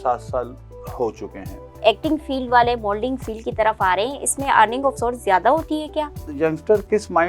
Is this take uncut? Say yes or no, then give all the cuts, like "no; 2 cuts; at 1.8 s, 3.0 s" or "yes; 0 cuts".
no; 2 cuts; at 1.7 s, 6.3 s